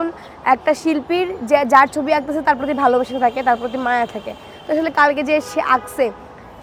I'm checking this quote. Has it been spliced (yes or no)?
no